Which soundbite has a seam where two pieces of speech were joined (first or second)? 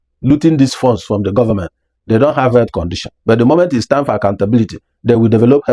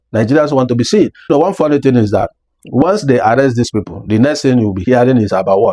second